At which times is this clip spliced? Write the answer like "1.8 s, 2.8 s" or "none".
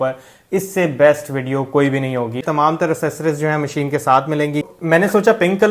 2.4 s, 4.7 s